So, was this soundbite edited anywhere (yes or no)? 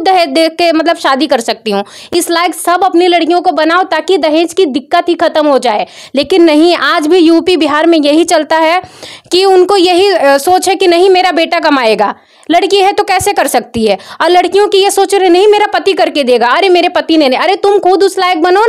no